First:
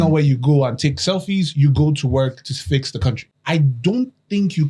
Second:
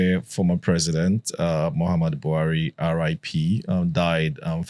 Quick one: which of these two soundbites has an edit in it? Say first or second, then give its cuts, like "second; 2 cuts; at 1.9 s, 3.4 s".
first; 1 cut; at 3.3 s